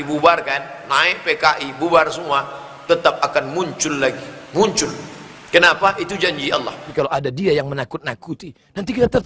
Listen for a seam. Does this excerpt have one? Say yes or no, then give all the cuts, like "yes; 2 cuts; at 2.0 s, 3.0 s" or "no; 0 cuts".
yes; 1 cut; at 6.9 s